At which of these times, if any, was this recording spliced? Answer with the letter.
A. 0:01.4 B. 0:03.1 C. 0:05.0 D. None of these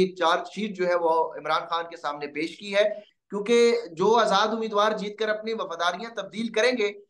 B